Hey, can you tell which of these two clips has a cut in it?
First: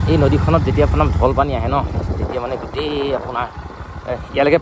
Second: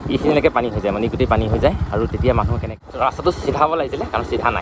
second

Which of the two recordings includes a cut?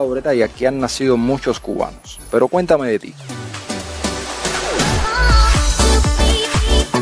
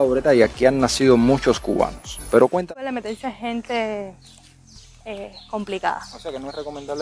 second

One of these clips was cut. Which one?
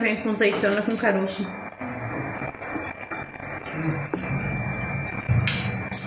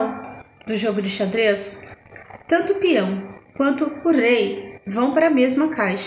first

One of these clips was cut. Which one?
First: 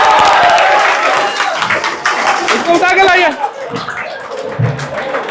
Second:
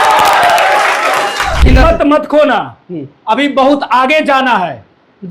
second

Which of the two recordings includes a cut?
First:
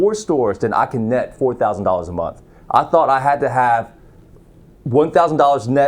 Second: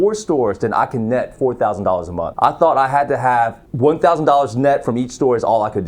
second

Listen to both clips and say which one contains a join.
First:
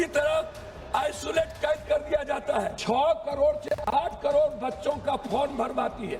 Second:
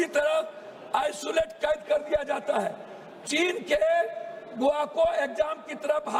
first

